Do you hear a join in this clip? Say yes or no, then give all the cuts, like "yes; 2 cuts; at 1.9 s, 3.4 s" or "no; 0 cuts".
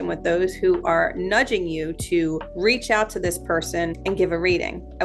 yes; 2 cuts; at 2.5 s, 4.0 s